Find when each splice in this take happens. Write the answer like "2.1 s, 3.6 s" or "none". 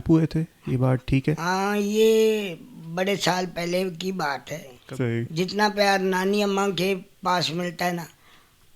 4.8 s